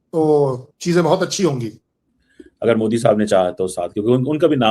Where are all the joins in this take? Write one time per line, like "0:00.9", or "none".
none